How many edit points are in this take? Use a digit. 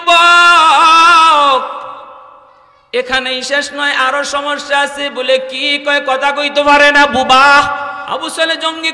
1